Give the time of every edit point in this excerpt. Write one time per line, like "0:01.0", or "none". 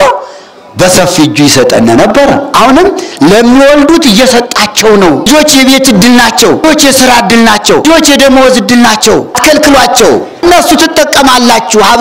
0:02.5
0:05.3
0:06.6
0:07.9
0:09.4
0:10.4